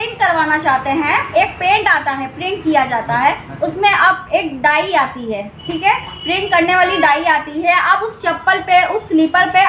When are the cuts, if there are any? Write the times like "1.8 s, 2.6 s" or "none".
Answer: none

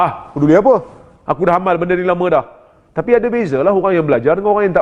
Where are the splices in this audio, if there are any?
none

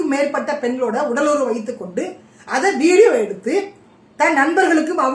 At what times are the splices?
none

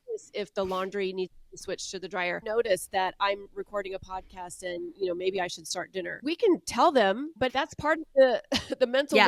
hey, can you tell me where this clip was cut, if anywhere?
2.4 s, 6.2 s, 7.4 s

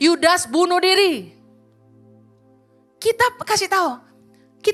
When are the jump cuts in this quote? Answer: none

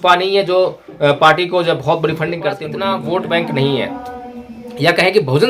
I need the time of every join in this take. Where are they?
2.7 s

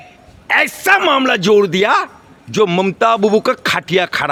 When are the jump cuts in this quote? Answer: none

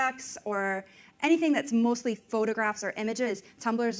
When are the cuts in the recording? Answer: none

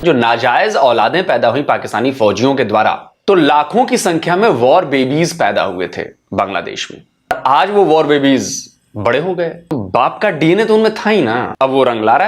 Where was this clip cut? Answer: 3.1 s, 7.3 s, 9.7 s, 11.5 s

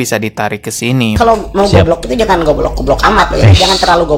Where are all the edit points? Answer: 1.2 s

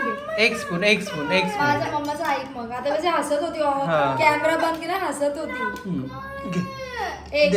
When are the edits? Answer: none

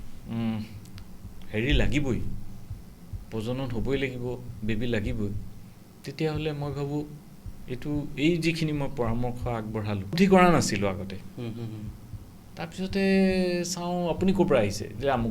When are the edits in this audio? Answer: 10.1 s

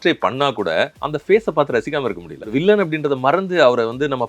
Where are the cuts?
1.0 s, 2.5 s

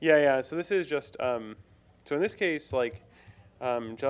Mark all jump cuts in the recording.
1.1 s

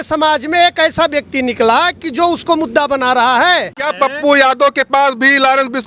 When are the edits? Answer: 3.8 s

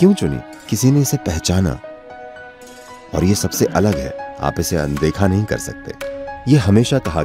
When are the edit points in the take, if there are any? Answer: 6.4 s

